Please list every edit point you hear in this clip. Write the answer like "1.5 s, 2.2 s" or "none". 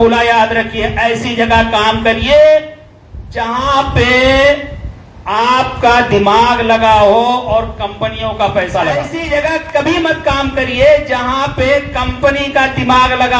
9.2 s